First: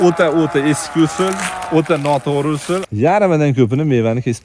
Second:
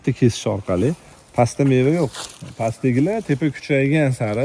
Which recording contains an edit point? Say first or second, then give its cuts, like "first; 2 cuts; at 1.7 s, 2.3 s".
first; 1 cut; at 2.9 s